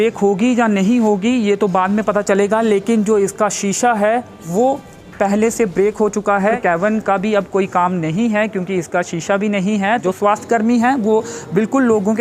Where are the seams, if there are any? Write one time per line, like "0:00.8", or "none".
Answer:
0:06.6
0:10.0